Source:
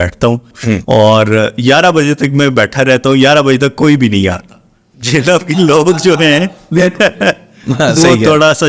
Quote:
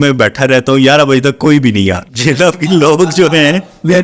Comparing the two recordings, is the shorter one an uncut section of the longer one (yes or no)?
no